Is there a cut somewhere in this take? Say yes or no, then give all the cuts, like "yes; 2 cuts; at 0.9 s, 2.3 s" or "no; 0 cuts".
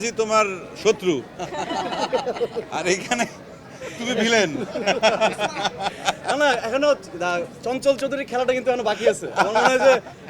no; 0 cuts